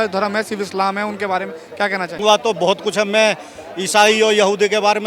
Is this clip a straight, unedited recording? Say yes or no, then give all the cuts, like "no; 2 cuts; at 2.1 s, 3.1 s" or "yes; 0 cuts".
no; 1 cut; at 2.2 s